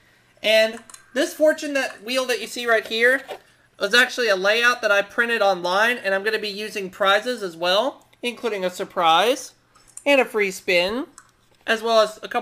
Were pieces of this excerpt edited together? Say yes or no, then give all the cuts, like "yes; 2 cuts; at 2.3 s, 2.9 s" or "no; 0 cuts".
yes; 1 cut; at 5.6 s